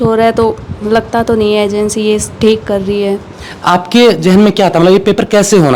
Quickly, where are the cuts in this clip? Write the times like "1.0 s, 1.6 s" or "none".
none